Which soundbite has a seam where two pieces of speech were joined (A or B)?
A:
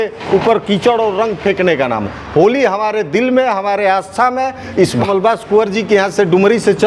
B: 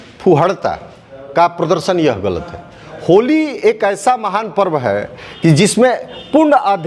A